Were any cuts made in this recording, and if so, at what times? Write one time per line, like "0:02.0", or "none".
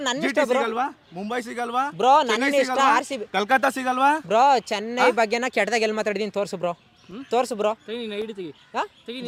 none